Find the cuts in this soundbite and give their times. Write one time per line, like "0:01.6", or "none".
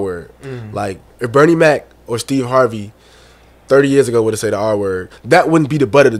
0:01.1